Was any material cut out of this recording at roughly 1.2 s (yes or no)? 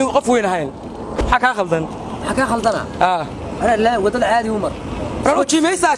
yes